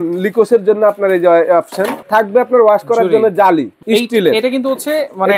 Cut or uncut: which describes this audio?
cut